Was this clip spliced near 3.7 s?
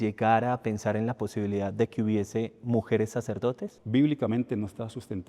yes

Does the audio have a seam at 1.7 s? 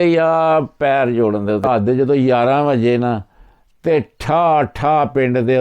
yes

